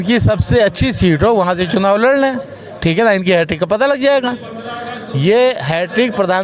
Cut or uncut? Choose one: uncut